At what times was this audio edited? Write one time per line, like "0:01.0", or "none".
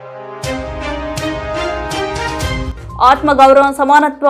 0:02.7